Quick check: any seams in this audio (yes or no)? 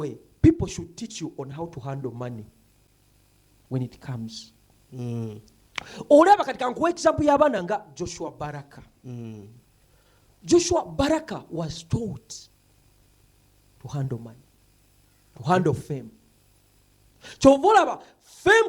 no